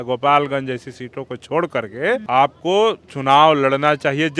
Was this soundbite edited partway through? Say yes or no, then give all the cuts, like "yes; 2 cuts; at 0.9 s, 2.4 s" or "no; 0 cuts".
yes; 2 cuts; at 2.2 s, 3.1 s